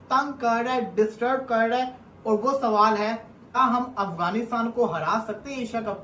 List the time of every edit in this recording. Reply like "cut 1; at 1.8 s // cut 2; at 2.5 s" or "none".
cut 1; at 3.6 s